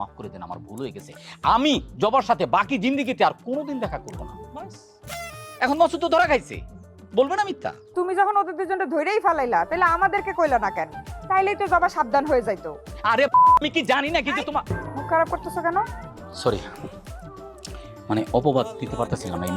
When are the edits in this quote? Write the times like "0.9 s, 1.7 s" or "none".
none